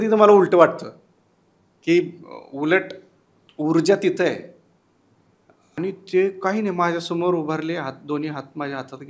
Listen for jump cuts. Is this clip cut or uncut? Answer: cut